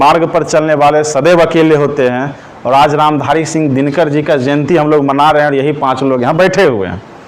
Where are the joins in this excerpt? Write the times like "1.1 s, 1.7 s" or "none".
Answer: none